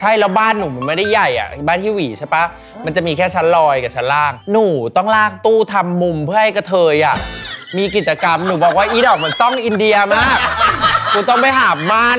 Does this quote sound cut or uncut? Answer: uncut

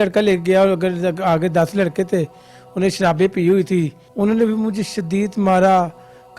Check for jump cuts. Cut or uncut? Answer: cut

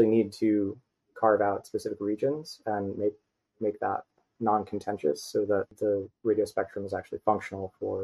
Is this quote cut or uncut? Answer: cut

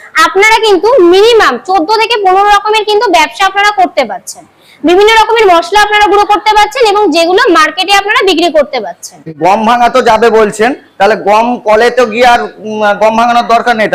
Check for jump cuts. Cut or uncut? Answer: uncut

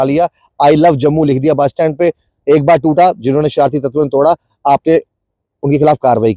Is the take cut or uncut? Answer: uncut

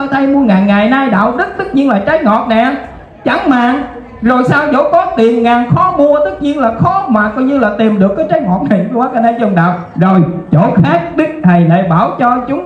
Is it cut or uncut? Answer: uncut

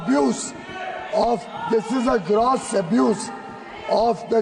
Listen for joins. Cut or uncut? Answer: uncut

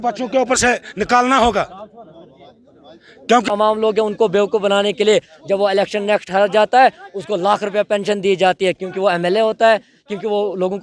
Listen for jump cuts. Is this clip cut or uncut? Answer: cut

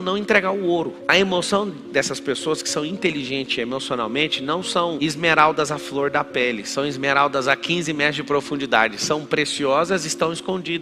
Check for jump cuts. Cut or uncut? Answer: uncut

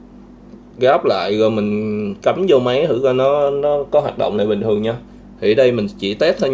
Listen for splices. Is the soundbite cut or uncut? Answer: uncut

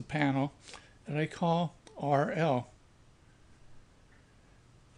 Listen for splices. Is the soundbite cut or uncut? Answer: cut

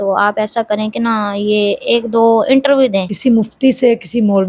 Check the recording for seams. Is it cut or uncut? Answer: cut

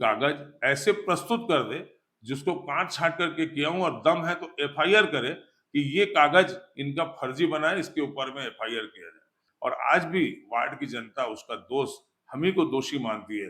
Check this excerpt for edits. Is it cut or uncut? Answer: cut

